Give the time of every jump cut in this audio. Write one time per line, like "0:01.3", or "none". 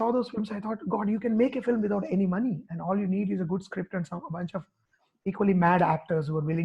none